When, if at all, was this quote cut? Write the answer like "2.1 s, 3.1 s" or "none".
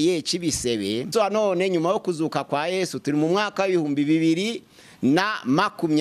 1.1 s